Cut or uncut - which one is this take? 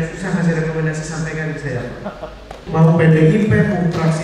cut